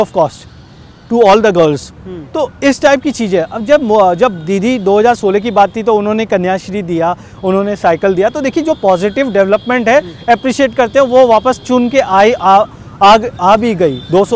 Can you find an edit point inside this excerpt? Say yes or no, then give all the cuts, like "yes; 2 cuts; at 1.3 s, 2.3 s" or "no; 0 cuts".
no; 0 cuts